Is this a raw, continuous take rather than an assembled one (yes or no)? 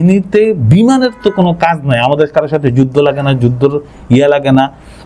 yes